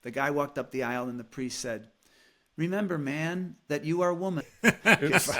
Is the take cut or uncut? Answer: cut